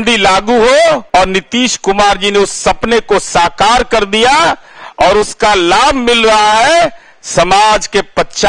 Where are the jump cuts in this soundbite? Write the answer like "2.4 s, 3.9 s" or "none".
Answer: 1.0 s

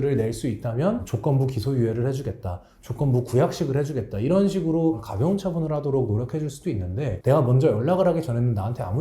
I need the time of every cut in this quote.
1.1 s, 7.2 s

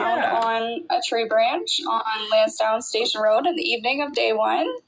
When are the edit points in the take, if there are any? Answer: 3.9 s

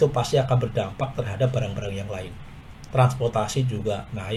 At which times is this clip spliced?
none

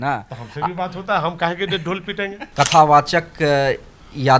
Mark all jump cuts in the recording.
2.4 s

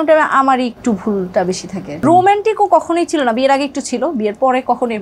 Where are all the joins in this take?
2.0 s

